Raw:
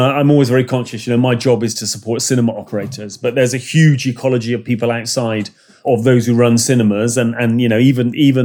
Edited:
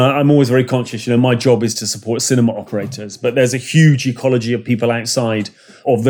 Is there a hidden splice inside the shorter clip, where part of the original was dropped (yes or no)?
no